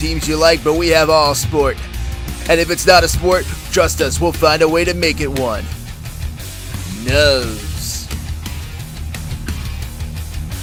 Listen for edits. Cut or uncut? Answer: uncut